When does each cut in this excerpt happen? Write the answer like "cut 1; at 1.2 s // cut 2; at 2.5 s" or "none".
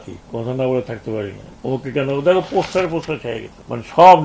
cut 1; at 1.5 s